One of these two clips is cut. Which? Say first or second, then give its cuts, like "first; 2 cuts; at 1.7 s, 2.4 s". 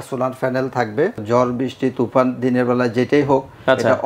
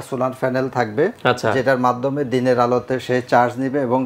first; 1 cut; at 1.2 s